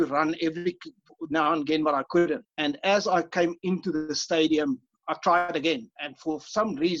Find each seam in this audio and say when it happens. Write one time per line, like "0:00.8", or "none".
0:02.5
0:04.9

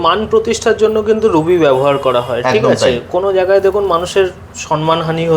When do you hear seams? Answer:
none

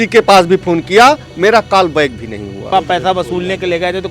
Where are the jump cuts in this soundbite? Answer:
0:02.7

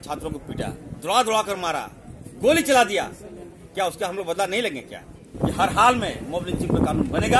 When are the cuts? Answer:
0:05.3

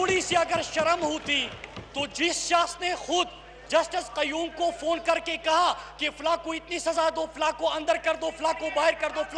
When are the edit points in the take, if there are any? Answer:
none

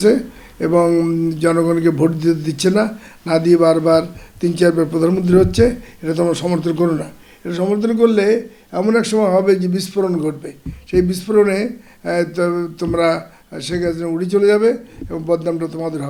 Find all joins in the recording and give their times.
none

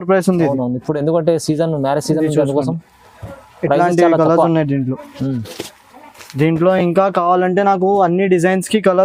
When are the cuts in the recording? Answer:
none

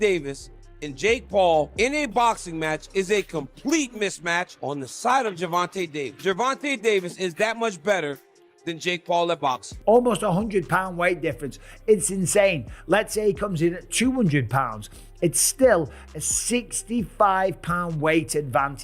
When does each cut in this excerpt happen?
0:09.7

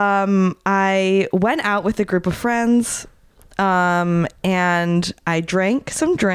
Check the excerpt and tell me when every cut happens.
none

